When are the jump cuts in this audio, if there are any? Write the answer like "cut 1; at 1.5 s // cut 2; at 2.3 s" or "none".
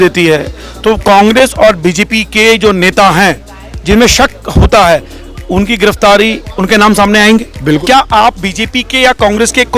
cut 1; at 7.8 s

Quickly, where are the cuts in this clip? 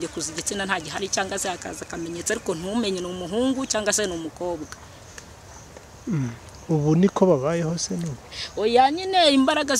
none

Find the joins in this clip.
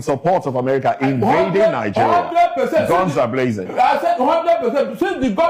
none

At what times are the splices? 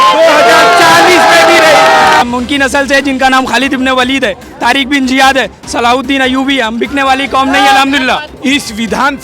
cut 1; at 2.2 s // cut 2; at 8.3 s

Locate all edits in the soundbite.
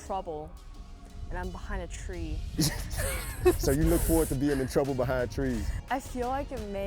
cut 1; at 2.5 s // cut 2; at 5.7 s

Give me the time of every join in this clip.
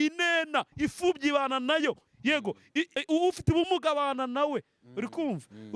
cut 1; at 3.0 s

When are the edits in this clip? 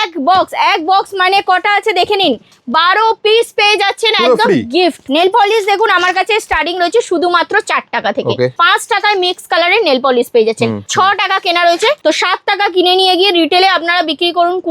cut 1; at 5.0 s // cut 2; at 8.6 s // cut 3; at 10.8 s // cut 4; at 12.0 s

